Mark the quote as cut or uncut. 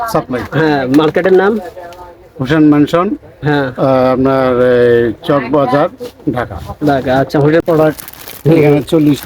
cut